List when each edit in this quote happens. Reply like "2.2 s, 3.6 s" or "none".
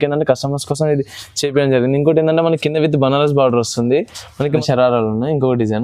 4.6 s